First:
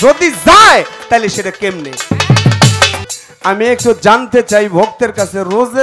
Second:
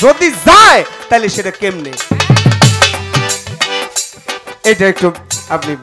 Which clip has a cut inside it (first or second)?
first